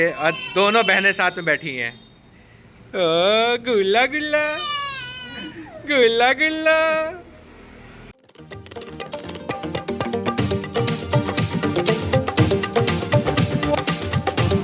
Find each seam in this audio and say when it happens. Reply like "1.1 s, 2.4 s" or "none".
none